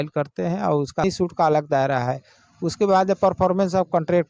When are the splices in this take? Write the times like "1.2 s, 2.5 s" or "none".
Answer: 1.0 s